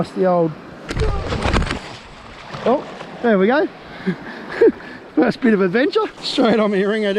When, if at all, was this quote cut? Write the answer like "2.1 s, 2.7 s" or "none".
6.2 s